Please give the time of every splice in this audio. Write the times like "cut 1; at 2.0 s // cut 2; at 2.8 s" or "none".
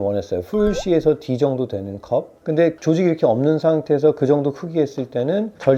none

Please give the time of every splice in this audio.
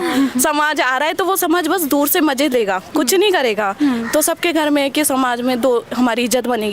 none

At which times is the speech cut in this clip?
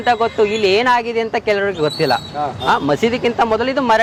none

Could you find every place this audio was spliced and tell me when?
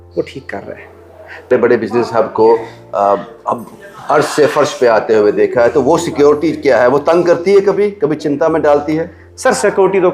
cut 1; at 1.5 s

